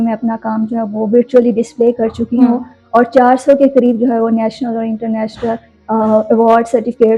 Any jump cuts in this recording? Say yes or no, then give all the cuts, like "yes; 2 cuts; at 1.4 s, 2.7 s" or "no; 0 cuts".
no; 0 cuts